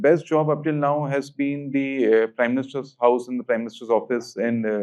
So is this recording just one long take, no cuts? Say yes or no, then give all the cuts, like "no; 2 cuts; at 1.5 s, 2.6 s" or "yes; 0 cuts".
yes; 0 cuts